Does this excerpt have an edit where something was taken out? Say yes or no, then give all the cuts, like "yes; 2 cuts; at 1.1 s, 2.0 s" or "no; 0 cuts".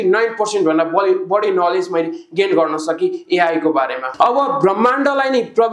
yes; 1 cut; at 4.1 s